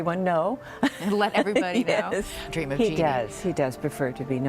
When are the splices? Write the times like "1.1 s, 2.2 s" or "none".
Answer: 2.5 s

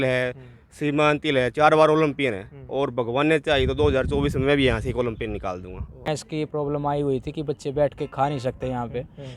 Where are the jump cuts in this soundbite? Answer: 6.1 s

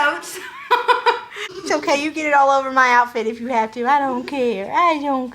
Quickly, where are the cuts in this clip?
1.3 s

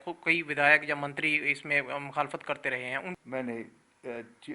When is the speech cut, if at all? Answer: 3.2 s

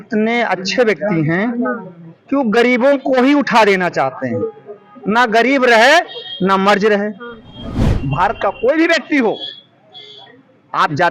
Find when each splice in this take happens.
7.9 s

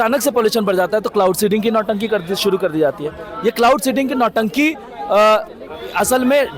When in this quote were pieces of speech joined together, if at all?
none

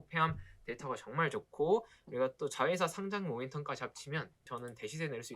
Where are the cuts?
4.4 s

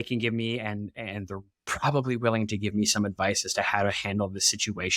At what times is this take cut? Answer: none

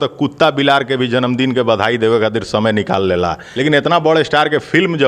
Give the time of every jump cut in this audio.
3.5 s

